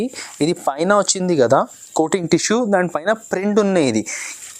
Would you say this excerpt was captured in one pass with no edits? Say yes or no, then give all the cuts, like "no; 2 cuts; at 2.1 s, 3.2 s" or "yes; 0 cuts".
yes; 0 cuts